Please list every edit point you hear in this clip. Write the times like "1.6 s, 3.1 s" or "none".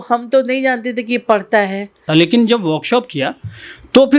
2.0 s